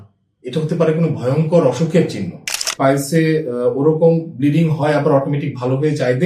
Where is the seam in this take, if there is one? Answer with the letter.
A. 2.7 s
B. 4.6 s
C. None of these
A